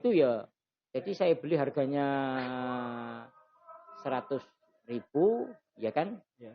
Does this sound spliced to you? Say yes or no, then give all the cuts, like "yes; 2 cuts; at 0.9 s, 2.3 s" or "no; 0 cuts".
no; 0 cuts